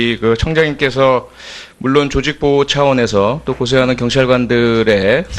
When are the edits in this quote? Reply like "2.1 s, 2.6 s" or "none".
none